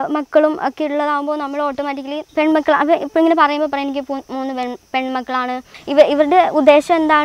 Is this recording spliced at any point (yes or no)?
yes